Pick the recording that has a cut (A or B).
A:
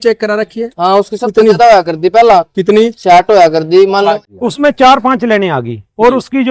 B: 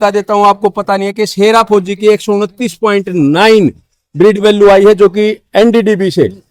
A